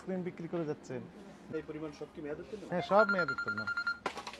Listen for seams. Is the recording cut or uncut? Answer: cut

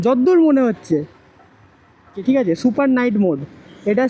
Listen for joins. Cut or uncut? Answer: cut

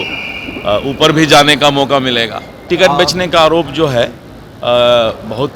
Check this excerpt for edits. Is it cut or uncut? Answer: cut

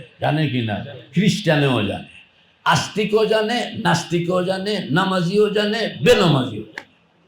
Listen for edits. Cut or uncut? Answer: uncut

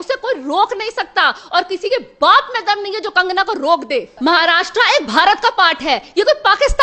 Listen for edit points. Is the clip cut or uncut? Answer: cut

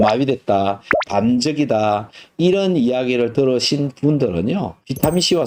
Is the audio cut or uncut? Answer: uncut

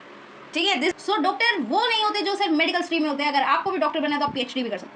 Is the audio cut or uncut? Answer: cut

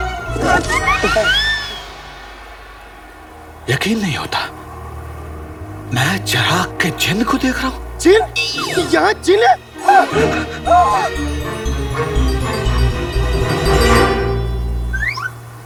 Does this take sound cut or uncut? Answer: uncut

